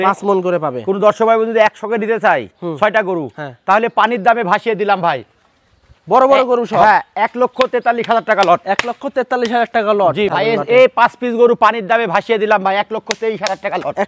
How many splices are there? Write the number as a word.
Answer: one